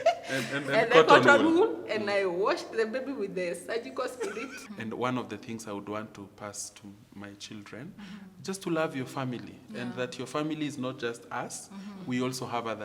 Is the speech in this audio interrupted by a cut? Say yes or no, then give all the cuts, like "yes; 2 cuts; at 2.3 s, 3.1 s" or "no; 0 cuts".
yes; 1 cut; at 4.6 s